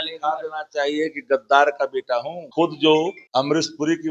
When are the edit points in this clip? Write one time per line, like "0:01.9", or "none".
0:02.4
0:03.2